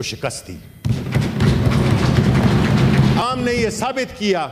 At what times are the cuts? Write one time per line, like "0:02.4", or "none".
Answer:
0:03.2